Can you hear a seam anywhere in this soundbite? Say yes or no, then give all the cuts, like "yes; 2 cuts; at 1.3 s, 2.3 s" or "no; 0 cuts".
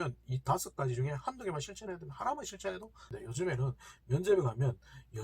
yes; 1 cut; at 3.1 s